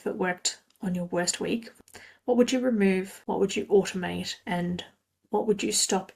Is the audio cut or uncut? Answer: cut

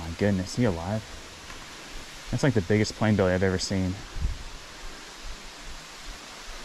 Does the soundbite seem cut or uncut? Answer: uncut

